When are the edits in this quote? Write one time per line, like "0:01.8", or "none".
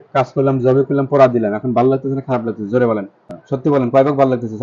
0:03.6